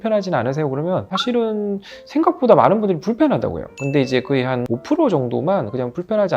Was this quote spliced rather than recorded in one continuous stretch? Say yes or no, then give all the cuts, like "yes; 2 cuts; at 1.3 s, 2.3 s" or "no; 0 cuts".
no; 0 cuts